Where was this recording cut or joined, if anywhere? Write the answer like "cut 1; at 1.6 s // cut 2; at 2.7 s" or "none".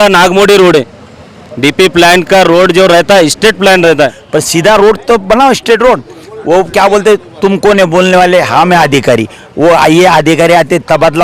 cut 1; at 4.2 s